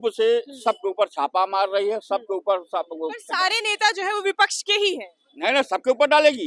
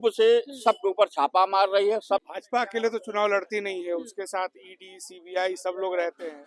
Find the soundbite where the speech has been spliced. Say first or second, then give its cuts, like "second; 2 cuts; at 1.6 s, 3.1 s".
second; 1 cut; at 2.2 s